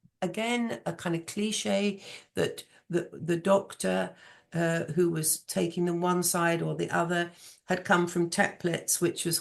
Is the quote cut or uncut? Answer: uncut